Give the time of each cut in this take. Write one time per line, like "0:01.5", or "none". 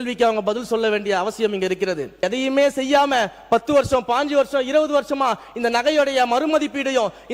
0:02.2